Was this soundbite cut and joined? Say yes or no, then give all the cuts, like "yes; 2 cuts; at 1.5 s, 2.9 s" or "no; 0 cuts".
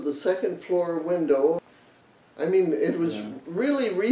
yes; 1 cut; at 1.7 s